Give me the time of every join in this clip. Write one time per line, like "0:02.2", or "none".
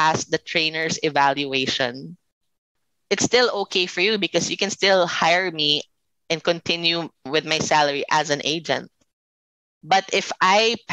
0:07.3